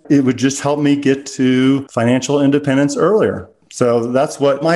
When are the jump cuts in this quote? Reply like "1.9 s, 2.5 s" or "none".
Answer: 1.9 s